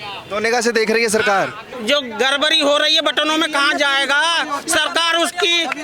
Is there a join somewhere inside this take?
yes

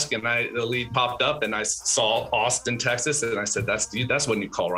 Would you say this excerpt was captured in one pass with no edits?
yes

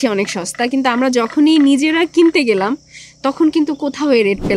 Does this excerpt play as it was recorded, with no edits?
yes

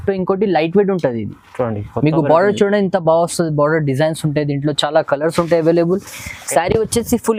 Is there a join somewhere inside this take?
no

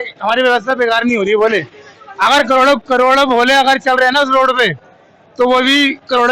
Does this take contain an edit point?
no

